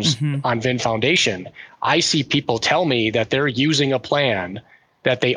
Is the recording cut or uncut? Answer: uncut